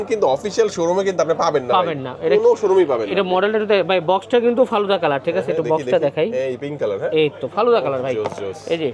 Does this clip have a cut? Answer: no; 0 cuts

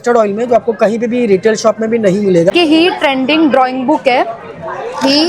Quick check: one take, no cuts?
no; 1 cut; at 2.5 s

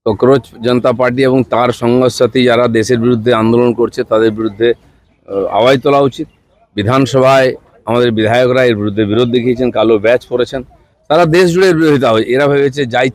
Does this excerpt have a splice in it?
no; 0 cuts

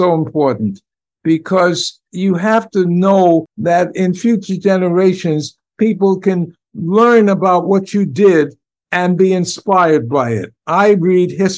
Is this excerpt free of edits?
no; 1 cut; at 3.5 s

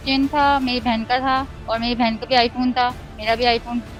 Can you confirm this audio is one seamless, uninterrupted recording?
yes; 0 cuts

